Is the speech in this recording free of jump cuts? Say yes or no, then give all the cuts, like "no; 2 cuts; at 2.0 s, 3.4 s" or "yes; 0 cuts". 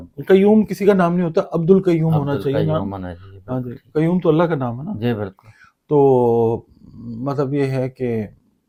yes; 0 cuts